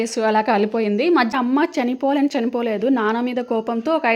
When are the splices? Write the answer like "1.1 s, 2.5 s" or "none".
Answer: 1.3 s